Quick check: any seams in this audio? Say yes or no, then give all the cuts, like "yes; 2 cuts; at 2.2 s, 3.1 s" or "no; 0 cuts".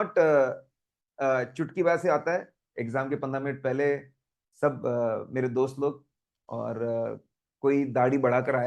yes; 1 cut; at 2.5 s